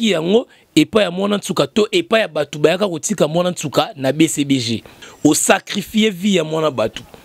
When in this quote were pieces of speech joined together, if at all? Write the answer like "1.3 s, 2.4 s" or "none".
5.0 s